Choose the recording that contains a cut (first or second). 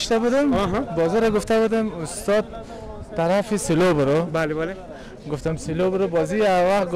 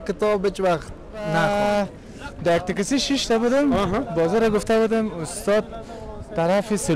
second